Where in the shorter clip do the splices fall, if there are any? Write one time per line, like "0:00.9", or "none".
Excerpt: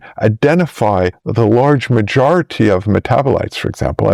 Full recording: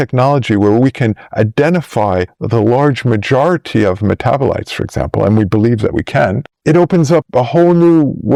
none